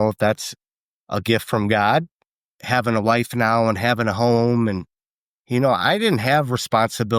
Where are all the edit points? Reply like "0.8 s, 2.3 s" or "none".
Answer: 2.5 s